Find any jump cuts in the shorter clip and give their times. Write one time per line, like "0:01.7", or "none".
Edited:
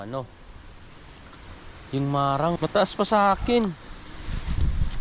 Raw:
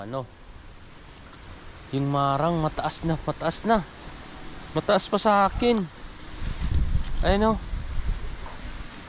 0:02.6